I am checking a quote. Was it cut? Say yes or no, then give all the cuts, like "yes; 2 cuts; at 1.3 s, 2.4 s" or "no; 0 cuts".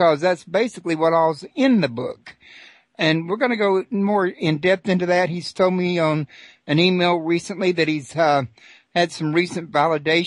yes; 1 cut; at 3.1 s